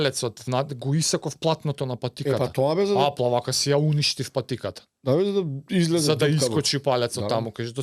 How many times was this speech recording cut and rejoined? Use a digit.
0